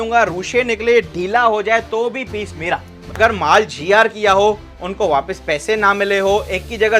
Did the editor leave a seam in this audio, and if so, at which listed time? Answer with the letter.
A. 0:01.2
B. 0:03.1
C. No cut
B